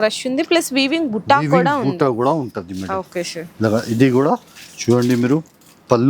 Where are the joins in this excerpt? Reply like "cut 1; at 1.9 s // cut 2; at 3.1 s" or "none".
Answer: none